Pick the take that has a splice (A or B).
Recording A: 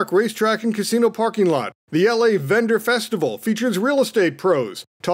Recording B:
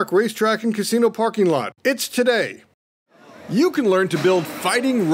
A